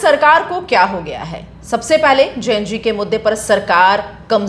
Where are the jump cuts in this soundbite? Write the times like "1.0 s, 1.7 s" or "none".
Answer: none